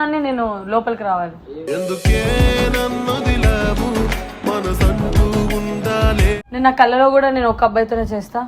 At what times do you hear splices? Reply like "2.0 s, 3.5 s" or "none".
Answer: 6.3 s